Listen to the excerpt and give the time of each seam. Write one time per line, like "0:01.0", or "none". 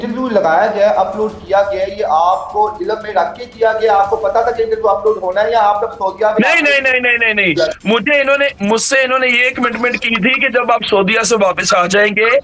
none

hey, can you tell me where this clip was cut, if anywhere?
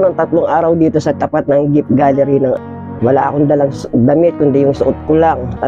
0:02.6

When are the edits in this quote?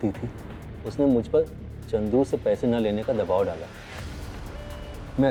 none

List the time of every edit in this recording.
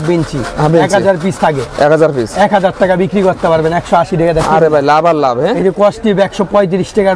none

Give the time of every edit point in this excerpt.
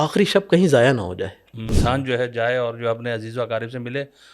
0:01.7

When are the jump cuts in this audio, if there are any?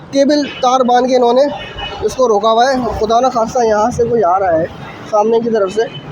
none

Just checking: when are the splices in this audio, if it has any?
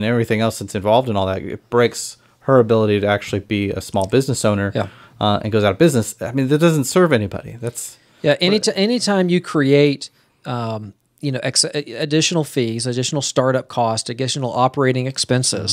none

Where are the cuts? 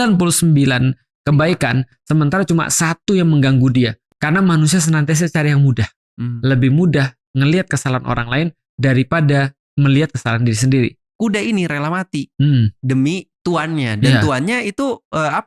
0:04.0
0:11.0

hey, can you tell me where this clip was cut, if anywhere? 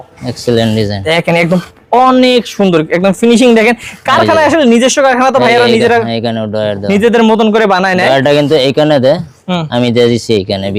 none

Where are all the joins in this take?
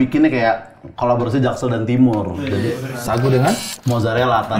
none

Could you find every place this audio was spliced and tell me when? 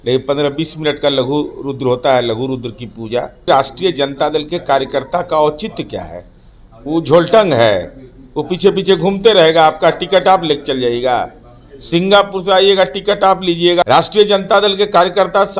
0:03.5
0:13.8

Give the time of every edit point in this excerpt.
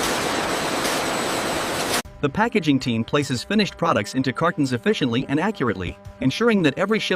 none

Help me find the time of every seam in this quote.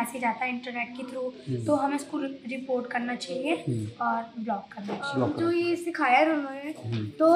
0:05.3

